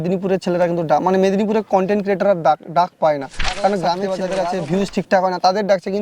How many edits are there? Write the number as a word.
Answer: one